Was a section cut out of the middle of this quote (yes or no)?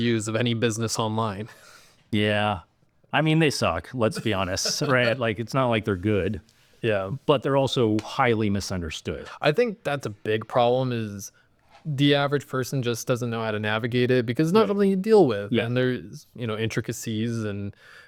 no